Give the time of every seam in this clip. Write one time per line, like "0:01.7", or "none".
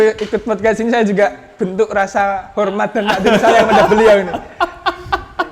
none